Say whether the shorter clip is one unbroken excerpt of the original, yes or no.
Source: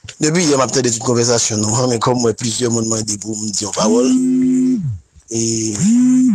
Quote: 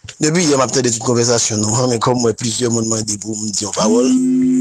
yes